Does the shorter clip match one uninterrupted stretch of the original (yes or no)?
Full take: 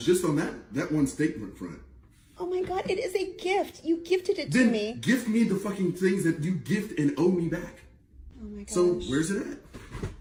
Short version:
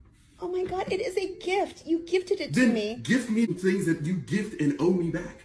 no